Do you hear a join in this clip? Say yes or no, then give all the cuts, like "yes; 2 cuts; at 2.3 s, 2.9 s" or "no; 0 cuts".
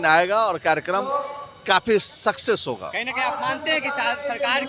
no; 0 cuts